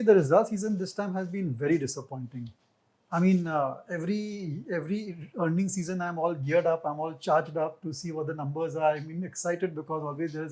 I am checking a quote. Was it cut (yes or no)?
no